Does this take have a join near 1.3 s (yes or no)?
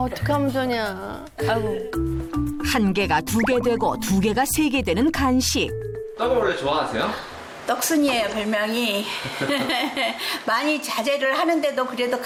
no